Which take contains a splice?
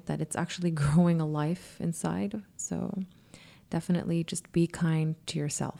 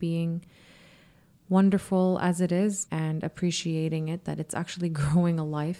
second; 1 cut; at 2.8 s

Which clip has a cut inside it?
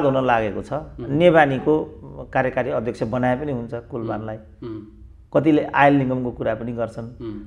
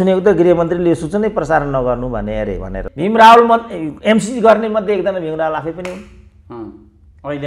second; 1 cut; at 2.8 s

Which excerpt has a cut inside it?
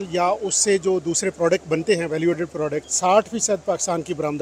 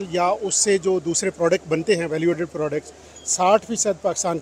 first; 1 cut; at 2.9 s

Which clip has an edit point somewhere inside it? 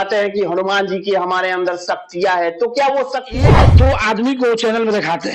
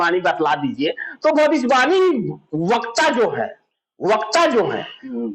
first; 1 cut; at 3.5 s

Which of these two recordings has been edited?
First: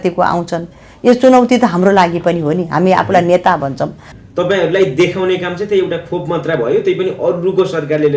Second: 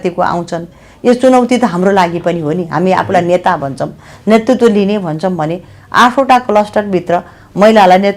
first; 1 cut; at 4.1 s

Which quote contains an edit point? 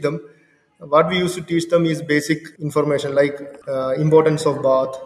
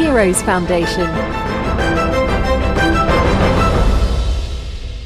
first; 1 cut; at 3.5 s

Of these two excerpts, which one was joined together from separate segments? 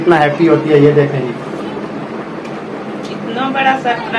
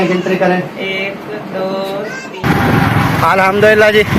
second; 1 cut; at 2.2 s

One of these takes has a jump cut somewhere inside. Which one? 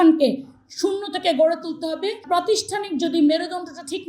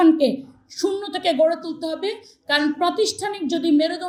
first; 1 cut; at 2.2 s

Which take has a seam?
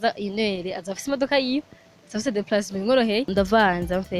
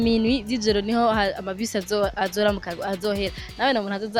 first; 1 cut; at 3.3 s

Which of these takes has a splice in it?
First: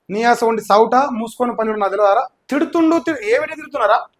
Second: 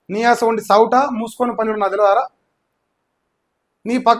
first; 1 cut; at 2.4 s

